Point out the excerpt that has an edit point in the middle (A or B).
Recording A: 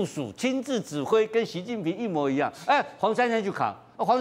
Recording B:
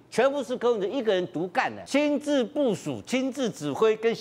B